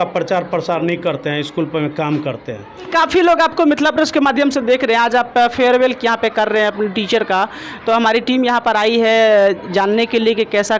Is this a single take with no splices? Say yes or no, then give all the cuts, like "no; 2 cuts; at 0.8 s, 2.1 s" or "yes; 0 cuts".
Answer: yes; 0 cuts